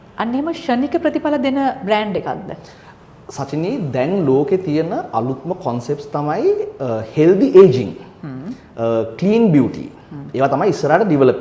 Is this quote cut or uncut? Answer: uncut